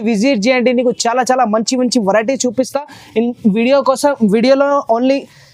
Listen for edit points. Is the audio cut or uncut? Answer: uncut